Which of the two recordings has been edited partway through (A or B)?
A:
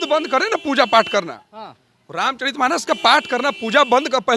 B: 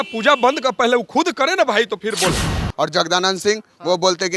B